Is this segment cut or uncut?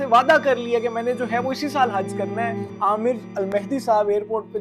cut